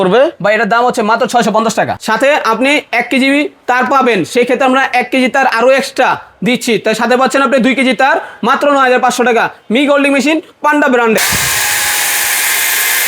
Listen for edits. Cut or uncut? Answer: cut